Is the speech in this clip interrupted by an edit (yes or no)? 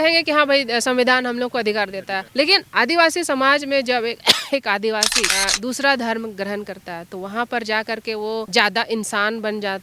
yes